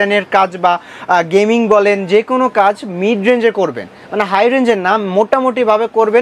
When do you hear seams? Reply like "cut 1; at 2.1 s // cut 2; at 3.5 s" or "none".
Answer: none